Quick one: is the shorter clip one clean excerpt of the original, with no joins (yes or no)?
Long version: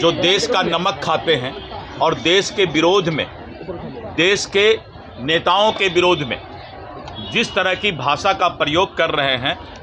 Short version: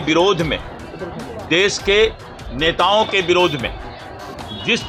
yes